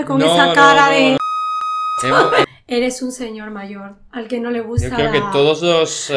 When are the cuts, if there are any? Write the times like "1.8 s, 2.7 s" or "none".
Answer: 2.6 s